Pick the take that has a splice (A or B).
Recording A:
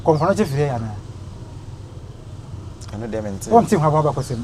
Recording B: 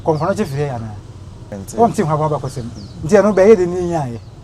B